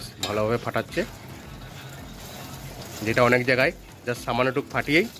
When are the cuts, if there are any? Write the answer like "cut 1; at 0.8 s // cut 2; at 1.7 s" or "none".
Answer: none